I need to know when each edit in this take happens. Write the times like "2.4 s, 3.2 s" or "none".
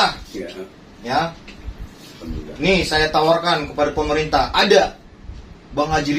none